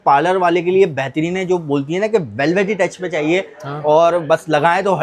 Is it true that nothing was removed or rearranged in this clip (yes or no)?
yes